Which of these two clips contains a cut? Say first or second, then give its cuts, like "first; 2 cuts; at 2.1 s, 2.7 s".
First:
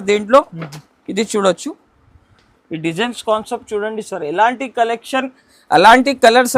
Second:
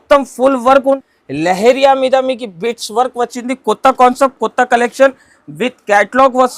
second; 1 cut; at 1.0 s